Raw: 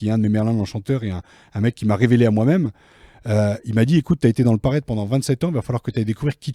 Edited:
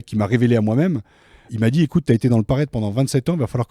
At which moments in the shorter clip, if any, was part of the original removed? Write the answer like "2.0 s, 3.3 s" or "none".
1.5 s